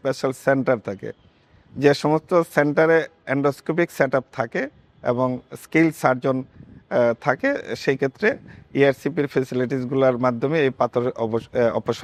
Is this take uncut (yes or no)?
yes